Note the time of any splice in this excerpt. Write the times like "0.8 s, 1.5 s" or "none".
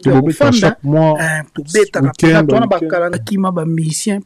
3.2 s